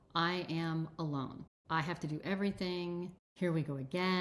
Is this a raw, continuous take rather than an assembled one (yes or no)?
no